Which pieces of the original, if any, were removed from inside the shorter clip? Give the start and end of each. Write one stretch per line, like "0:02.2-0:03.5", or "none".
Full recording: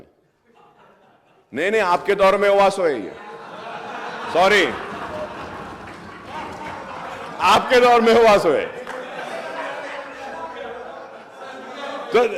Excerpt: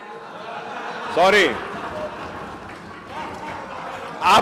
none